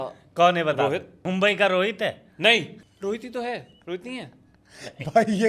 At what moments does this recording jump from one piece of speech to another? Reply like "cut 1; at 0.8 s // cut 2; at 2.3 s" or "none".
cut 1; at 1.2 s // cut 2; at 2.8 s // cut 3; at 3.7 s